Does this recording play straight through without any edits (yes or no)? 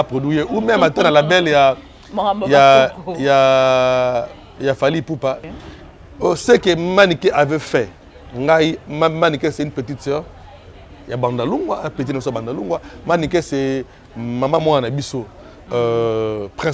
no